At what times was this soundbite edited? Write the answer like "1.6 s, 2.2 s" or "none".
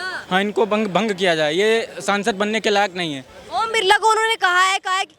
none